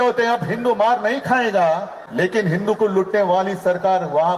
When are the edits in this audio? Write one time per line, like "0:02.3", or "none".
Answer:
0:02.0